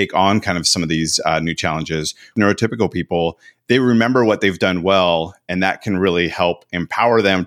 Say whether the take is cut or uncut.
cut